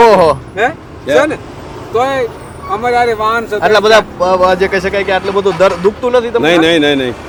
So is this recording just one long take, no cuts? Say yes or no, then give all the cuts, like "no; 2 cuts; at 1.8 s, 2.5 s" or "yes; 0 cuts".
yes; 0 cuts